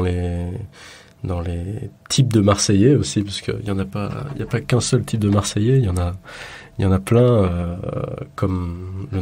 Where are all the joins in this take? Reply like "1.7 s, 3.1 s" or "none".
none